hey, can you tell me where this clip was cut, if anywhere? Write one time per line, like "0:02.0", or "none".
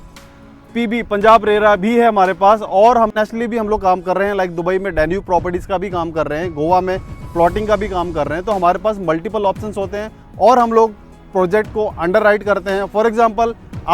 0:03.1